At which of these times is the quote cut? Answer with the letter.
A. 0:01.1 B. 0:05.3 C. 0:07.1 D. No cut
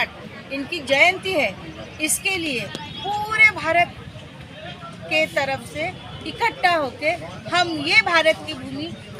D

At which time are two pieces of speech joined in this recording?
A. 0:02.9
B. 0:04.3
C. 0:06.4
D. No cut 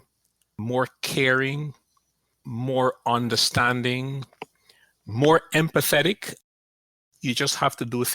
C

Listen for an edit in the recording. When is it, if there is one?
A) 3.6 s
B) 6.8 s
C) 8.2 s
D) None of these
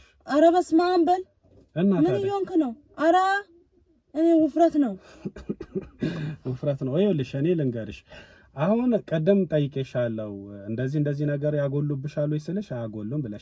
D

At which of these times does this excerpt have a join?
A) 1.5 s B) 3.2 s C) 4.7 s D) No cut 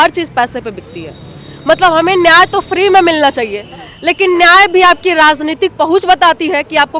D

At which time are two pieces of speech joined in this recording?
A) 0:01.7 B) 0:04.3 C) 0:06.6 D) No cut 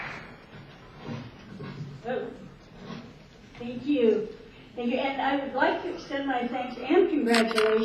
A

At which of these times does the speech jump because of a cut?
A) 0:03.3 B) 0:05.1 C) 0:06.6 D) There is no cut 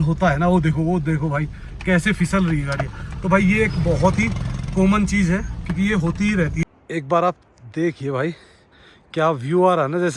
C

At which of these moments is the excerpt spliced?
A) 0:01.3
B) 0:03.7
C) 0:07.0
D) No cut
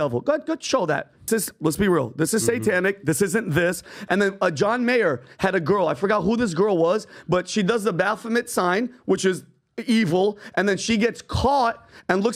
A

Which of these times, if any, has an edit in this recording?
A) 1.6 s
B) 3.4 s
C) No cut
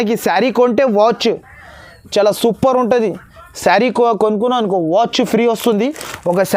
C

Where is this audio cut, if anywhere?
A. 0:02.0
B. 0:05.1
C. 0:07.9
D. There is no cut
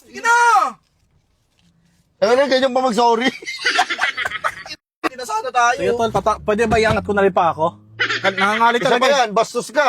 B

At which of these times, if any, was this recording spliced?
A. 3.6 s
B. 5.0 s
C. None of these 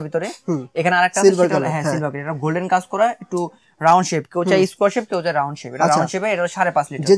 C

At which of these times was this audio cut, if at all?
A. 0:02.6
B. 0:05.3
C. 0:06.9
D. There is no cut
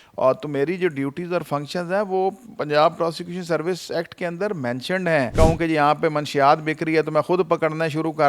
B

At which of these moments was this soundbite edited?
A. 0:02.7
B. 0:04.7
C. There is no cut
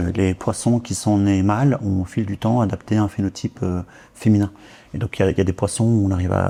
C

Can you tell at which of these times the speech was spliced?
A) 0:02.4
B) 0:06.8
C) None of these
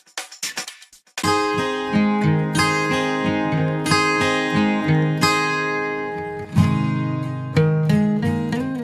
C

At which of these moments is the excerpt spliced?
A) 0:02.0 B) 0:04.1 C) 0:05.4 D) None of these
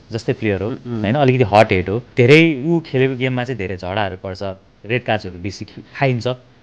A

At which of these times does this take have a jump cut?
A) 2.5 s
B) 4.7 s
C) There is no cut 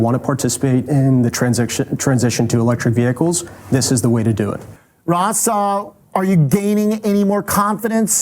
B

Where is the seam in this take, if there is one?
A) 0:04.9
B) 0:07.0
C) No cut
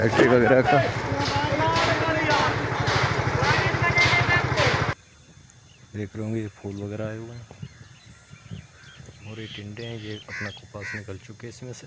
A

